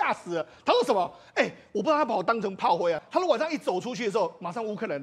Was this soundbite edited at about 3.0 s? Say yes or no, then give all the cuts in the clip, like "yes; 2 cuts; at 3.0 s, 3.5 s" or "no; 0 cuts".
yes; 1 cut; at 3.0 s